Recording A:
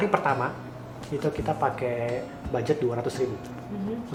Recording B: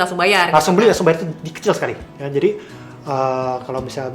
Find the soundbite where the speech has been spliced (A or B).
B